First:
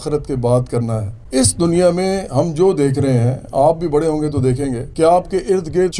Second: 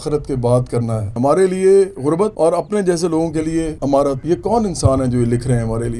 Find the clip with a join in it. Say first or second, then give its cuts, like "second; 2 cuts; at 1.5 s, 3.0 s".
second; 2 cuts; at 1.1 s, 4.2 s